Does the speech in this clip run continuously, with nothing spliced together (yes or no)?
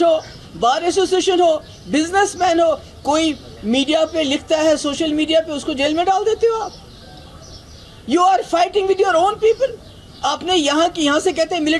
yes